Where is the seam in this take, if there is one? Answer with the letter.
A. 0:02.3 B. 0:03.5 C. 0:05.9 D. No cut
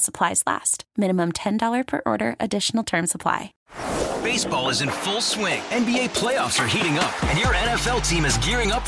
B